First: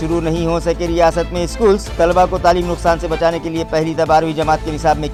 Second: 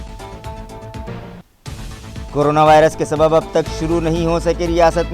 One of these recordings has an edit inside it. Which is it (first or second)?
second